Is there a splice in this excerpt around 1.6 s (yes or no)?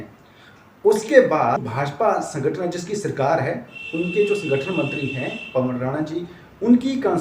yes